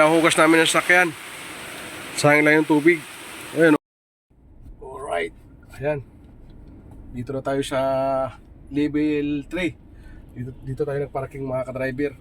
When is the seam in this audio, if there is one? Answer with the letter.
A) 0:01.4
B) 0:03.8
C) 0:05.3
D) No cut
B